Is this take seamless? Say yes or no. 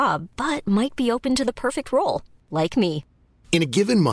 yes